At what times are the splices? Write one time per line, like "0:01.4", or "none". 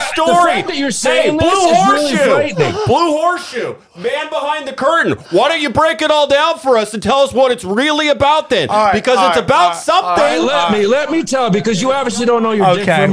none